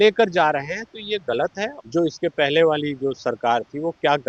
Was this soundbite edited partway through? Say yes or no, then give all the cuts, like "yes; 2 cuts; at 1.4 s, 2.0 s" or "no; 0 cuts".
yes; 1 cut; at 1.7 s